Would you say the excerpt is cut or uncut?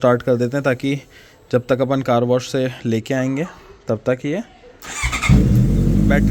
uncut